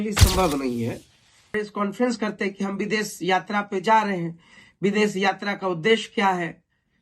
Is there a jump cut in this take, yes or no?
yes